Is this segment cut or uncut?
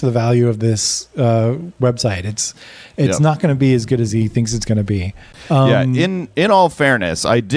uncut